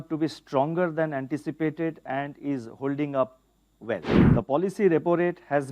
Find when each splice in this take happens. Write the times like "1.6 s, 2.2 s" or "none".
4.2 s